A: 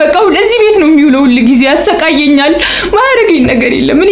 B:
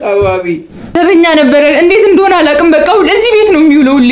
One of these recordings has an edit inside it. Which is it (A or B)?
B